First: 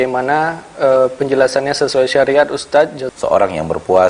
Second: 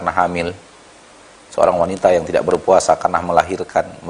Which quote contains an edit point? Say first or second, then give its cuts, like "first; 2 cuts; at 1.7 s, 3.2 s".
first; 1 cut; at 3.0 s